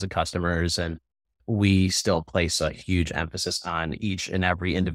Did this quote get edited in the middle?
no; 0 cuts

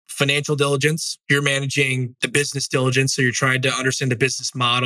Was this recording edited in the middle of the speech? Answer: yes; 1 cut; at 1.1 s

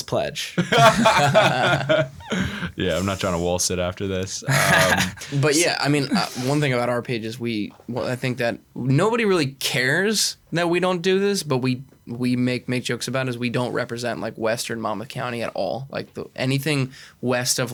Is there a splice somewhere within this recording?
no; 0 cuts

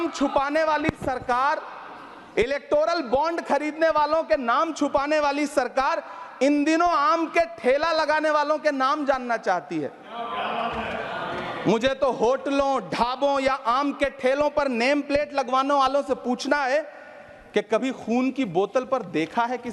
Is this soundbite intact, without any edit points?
yes; 0 cuts

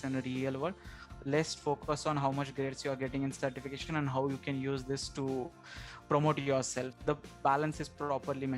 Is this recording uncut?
no; 1 cut; at 6.9 s

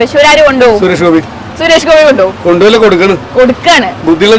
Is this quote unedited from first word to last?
yes; 0 cuts

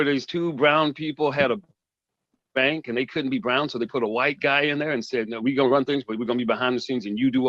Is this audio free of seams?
yes; 0 cuts

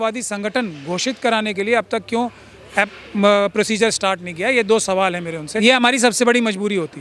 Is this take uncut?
no; 1 cut; at 5.5 s

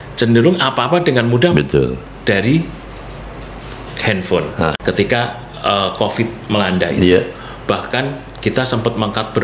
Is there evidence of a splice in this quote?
yes; 1 cut; at 4.8 s

